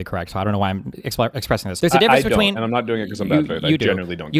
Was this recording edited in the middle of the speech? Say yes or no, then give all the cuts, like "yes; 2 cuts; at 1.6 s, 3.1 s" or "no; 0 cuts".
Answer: yes; 1 cut; at 1.7 s